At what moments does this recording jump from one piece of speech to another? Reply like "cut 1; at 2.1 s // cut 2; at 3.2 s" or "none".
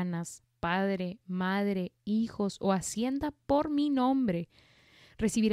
none

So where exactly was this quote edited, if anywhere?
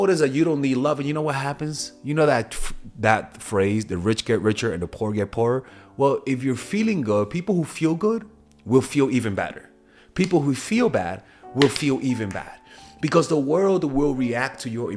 none

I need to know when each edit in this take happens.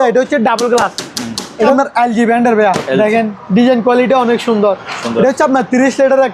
cut 1; at 1.7 s

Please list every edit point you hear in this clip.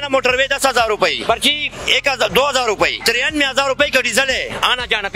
cut 1; at 1.2 s // cut 2; at 3.0 s

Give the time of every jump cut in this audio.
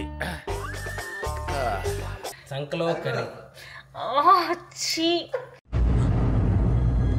cut 1; at 2.4 s

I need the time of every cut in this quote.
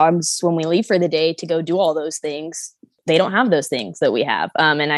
cut 1; at 3.0 s

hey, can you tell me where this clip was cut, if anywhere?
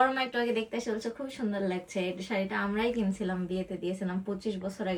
none

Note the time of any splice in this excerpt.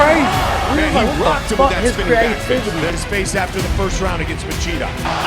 cut 1; at 2.9 s

